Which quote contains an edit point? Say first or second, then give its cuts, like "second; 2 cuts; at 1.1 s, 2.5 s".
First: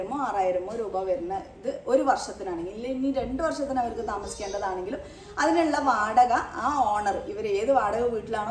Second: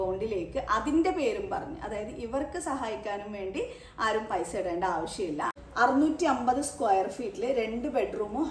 second; 1 cut; at 5.5 s